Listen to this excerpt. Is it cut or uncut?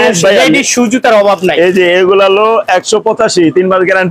uncut